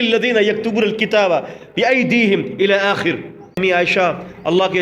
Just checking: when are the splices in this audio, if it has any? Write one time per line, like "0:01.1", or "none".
0:03.6